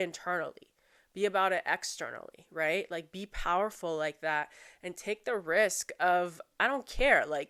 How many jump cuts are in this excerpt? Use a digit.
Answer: 0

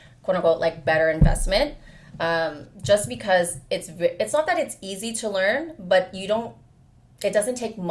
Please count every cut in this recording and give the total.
0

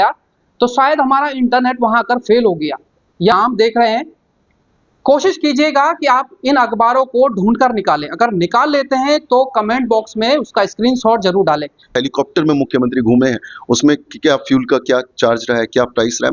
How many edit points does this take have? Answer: 2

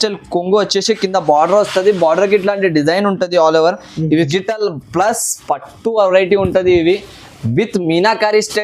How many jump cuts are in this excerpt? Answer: 1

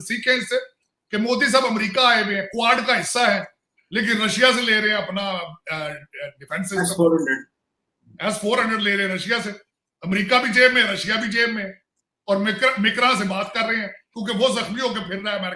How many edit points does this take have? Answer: 0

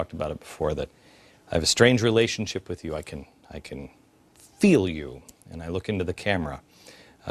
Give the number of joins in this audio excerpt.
1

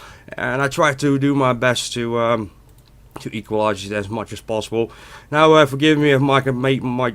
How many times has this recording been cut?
1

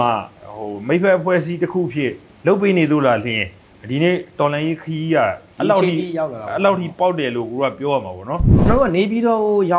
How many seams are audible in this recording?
1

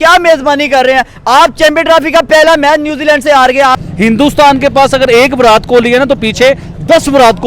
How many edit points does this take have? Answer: 1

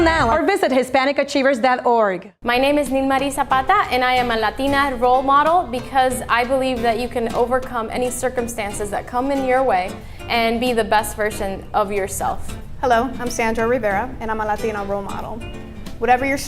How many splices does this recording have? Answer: 1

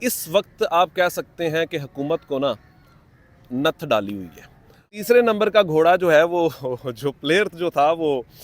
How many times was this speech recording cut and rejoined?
1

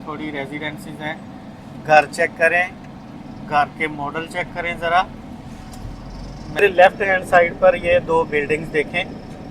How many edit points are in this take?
1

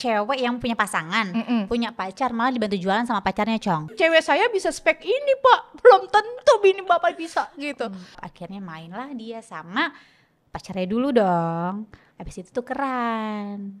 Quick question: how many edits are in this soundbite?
2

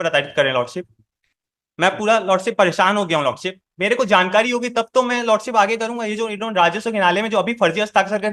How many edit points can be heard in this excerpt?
0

